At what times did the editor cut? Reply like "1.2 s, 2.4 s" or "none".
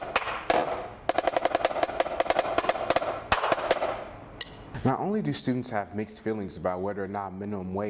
4.7 s